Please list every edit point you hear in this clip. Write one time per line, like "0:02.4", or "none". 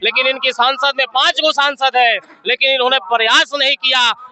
none